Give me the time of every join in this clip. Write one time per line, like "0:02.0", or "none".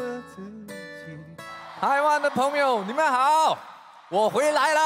0:01.6